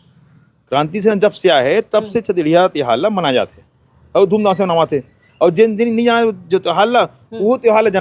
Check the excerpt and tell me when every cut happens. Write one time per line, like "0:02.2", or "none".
none